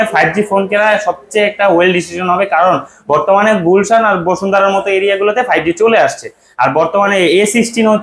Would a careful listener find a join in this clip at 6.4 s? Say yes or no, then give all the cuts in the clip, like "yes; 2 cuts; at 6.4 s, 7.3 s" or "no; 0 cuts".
no; 0 cuts